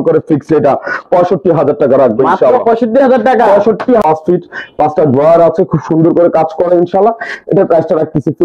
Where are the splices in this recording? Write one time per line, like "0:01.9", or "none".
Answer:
0:04.0

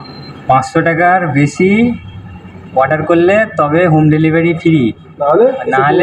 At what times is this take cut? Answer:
none

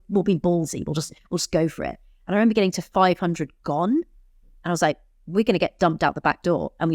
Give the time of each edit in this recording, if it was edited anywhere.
none

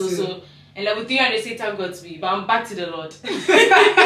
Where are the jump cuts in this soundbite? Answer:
none

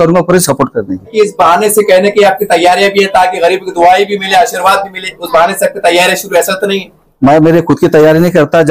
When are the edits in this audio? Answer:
0:01.1

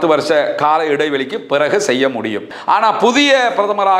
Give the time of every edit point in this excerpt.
0:02.5

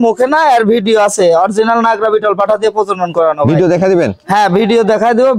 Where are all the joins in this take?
none

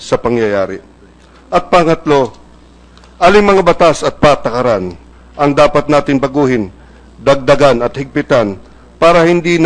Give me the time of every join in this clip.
0:05.8

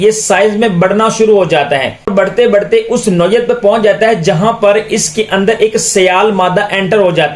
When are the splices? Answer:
0:02.1

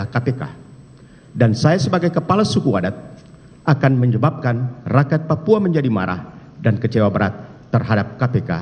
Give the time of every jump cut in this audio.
none

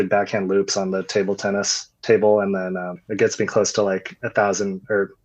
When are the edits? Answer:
0:03.0

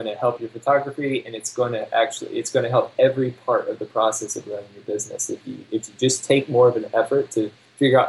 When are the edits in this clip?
none

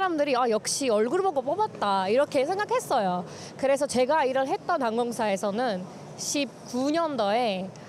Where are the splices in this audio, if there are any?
none

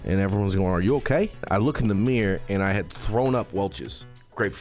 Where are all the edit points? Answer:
0:01.5

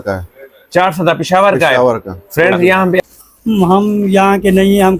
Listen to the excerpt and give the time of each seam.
0:03.0

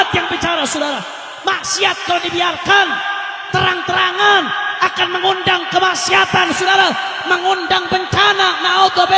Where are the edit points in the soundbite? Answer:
none

